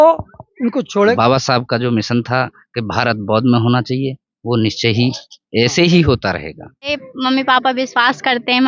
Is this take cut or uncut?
cut